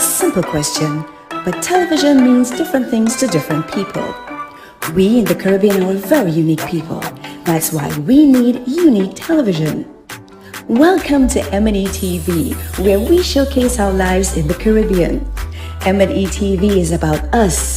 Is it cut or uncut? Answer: uncut